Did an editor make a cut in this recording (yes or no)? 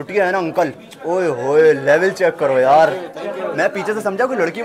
no